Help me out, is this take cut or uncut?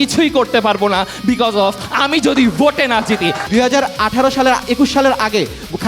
cut